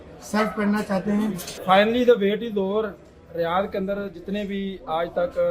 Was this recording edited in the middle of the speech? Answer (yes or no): yes